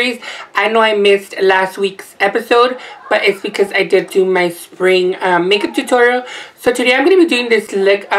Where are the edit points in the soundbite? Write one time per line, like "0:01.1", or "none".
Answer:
0:03.7